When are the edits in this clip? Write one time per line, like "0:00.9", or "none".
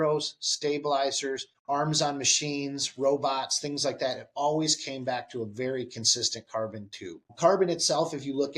0:01.5
0:07.3